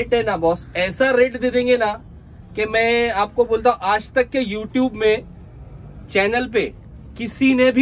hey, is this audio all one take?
yes; 0 cuts

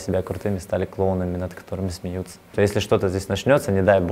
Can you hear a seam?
yes; 1 cut; at 2.5 s

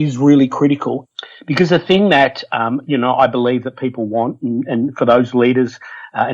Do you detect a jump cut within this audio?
yes; 1 cut; at 1.0 s

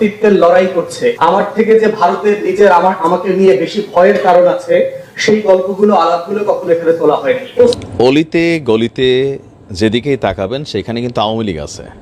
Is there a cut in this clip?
yes; 1 cut; at 7.8 s

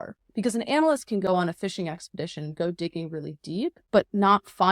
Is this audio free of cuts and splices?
no; 1 cut; at 3.8 s

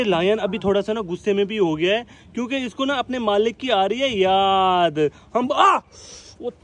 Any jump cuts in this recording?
no; 0 cuts

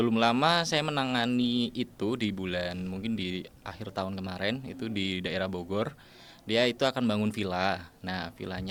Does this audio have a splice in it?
no; 0 cuts

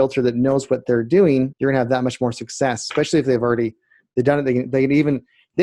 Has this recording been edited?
yes; 1 cut; at 1.5 s

